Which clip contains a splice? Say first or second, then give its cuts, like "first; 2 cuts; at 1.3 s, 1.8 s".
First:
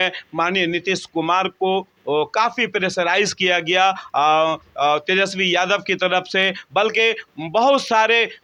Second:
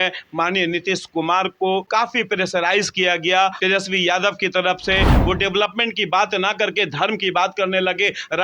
second; 3 cuts; at 1.9 s, 3.6 s, 5.2 s